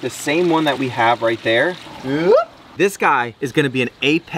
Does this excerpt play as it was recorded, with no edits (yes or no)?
no